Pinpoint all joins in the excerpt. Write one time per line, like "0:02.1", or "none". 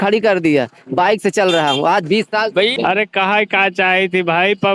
0:02.7